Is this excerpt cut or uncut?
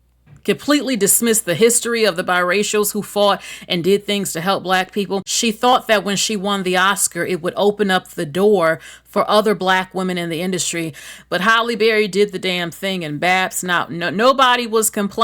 cut